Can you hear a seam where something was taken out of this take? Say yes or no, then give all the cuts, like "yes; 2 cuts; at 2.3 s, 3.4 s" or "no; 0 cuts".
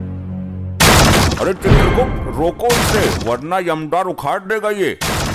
no; 0 cuts